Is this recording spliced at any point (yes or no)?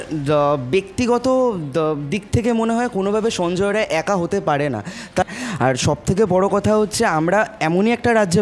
yes